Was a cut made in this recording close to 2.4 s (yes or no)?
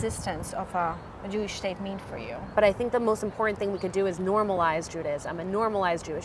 yes